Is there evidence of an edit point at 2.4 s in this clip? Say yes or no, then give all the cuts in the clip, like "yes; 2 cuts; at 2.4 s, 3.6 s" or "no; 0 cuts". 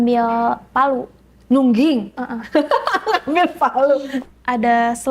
no; 1 cut; at 4.2 s